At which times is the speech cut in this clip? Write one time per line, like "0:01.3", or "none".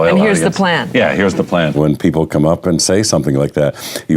0:01.8